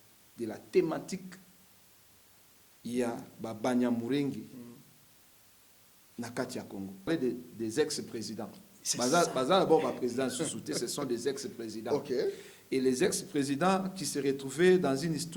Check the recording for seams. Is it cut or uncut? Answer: cut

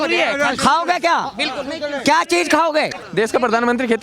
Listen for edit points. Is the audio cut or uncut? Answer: cut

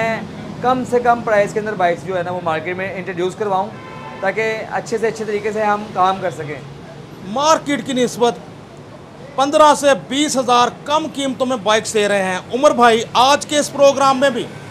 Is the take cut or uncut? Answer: uncut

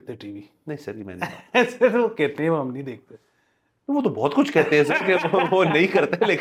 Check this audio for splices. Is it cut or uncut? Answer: uncut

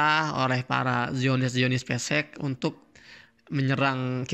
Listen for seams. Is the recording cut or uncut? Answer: uncut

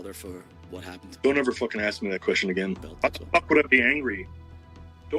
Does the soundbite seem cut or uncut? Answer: cut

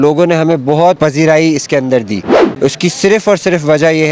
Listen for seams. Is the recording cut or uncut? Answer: cut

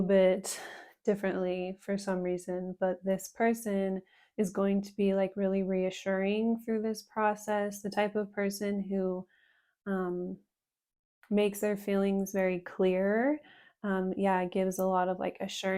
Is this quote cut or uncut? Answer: uncut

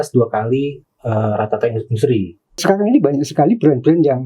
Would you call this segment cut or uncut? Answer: cut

